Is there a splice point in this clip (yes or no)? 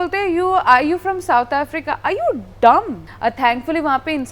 yes